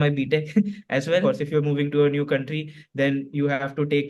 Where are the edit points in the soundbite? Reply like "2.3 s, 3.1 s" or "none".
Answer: 1.2 s